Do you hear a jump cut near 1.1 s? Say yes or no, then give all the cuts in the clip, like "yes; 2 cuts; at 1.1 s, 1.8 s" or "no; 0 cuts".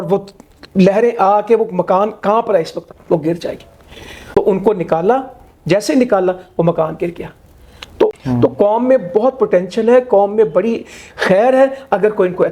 no; 2 cuts; at 4.0 s, 8.1 s